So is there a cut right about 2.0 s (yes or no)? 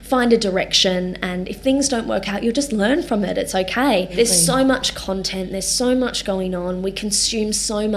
no